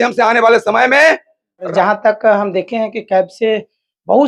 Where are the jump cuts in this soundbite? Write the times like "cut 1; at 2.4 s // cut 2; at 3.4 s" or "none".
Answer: cut 1; at 1.7 s